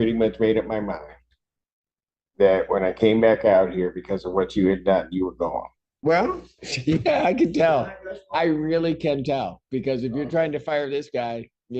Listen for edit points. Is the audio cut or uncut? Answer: cut